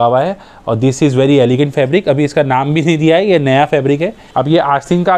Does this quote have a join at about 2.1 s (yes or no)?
no